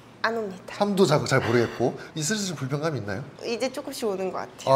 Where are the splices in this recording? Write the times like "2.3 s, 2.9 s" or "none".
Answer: 3.3 s